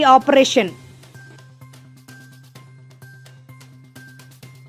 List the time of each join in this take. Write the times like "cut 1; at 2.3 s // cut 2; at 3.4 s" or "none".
none